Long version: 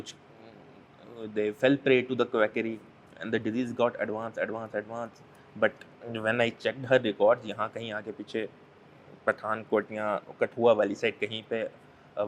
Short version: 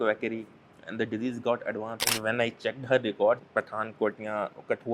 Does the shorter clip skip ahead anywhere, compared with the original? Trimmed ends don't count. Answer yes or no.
yes